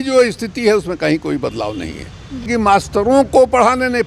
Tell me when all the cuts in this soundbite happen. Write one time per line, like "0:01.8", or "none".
0:02.5